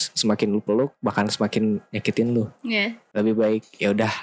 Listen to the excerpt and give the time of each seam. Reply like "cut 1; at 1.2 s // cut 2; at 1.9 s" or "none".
cut 1; at 3.0 s